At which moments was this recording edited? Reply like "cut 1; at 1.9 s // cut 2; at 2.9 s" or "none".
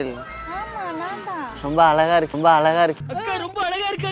cut 1; at 2.3 s